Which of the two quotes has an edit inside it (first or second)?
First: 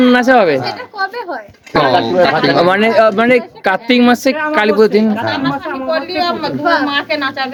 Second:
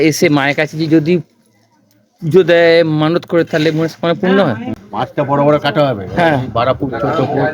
second